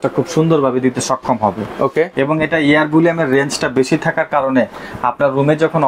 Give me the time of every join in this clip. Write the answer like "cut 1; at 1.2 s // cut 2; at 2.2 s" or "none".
none

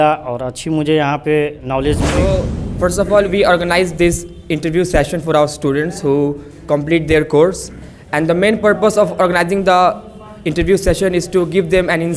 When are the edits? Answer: cut 1; at 2.4 s

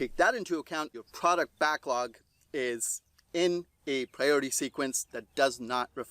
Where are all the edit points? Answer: cut 1; at 1.0 s

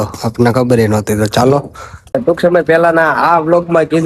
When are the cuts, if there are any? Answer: cut 1; at 2.1 s

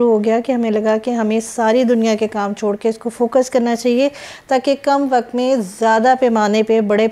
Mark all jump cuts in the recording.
none

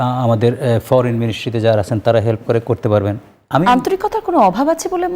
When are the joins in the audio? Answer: none

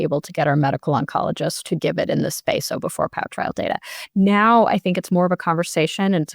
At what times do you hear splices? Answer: cut 1; at 1.6 s

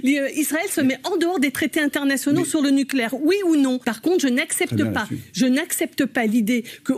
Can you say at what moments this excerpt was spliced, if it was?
cut 1; at 3.9 s

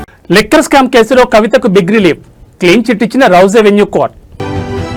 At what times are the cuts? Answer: none

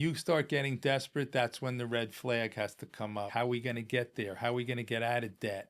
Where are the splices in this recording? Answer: cut 1; at 3.3 s

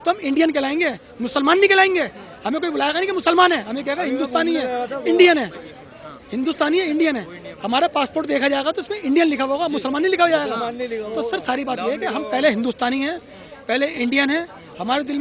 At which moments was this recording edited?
none

